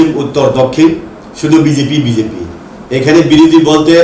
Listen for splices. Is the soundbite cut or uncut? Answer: uncut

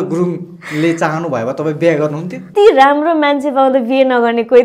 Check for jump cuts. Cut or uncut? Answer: cut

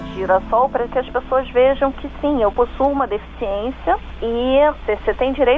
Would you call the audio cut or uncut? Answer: cut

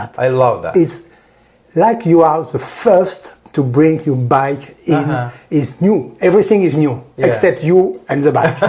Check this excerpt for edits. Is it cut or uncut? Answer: uncut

